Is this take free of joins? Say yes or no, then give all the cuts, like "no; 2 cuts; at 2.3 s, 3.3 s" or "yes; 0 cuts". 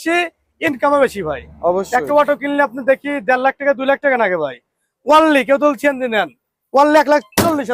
yes; 0 cuts